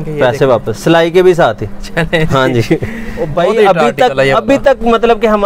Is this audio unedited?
no; 1 cut; at 3.1 s

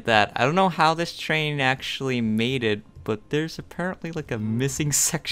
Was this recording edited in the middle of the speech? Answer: no; 0 cuts

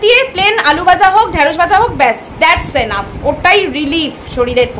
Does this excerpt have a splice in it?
no; 0 cuts

